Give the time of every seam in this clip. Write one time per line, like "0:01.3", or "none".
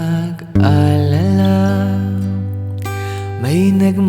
0:03.1